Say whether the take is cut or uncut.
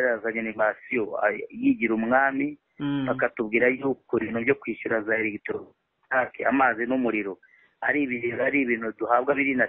uncut